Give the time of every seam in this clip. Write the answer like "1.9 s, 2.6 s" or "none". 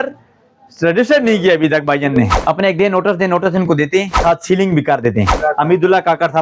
2.4 s, 4.1 s, 5.3 s

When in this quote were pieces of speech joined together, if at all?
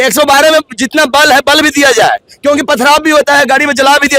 none

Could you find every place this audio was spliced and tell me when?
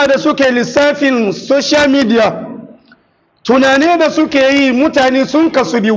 none

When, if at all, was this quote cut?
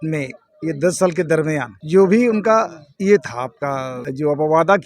1.7 s, 2.8 s, 4.0 s

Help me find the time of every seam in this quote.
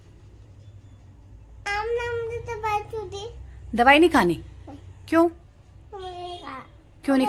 none

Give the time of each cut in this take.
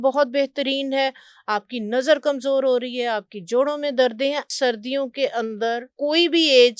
4.5 s, 5.9 s

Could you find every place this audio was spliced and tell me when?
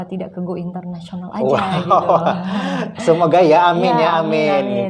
none

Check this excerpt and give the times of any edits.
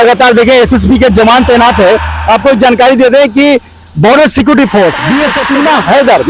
5.3 s

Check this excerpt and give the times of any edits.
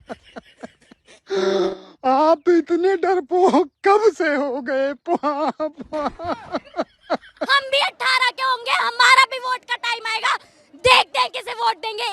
7.5 s

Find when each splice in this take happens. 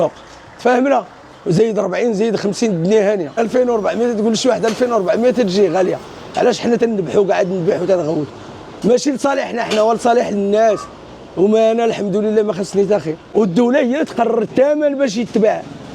3.4 s, 13.3 s

